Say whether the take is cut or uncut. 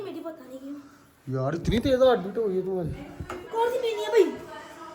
uncut